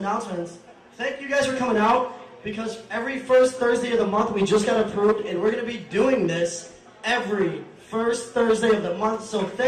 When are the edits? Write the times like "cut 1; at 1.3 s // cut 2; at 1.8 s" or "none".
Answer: cut 1; at 2.6 s